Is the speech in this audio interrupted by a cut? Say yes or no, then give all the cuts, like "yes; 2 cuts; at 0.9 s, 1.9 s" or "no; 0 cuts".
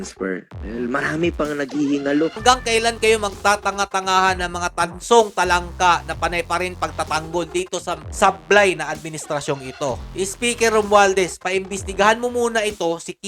yes; 2 cuts; at 2.4 s, 10.0 s